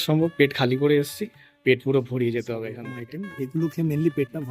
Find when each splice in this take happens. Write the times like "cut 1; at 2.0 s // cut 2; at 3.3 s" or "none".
cut 1; at 2.8 s

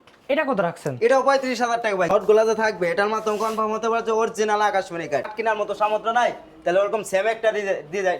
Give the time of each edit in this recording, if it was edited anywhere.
cut 1; at 2.2 s // cut 2; at 5.4 s

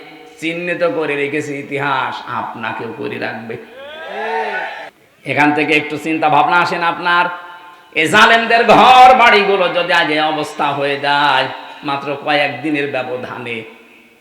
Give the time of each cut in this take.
cut 1; at 4.9 s

